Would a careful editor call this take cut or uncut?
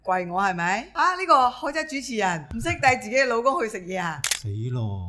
cut